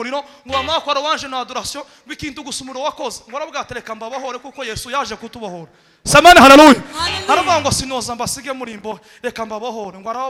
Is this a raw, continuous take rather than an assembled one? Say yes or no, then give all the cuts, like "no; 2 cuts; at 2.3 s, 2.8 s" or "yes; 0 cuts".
yes; 0 cuts